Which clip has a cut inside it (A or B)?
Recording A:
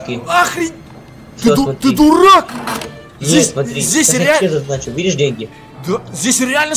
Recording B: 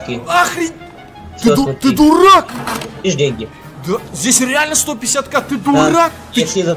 B